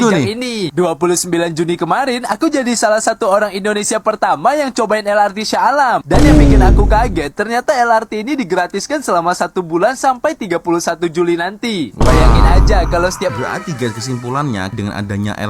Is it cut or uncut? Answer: cut